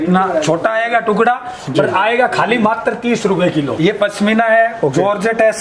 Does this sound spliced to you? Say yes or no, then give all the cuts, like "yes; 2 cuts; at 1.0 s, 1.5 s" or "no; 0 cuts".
yes; 1 cut; at 3.7 s